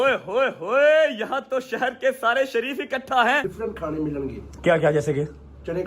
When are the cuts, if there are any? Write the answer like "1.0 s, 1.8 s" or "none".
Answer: 3.5 s